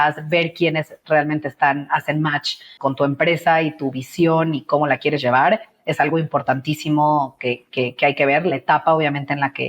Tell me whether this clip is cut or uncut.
cut